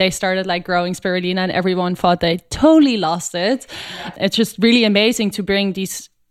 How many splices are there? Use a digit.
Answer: 1